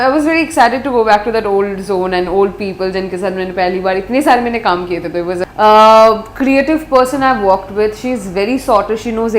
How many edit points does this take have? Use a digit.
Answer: 1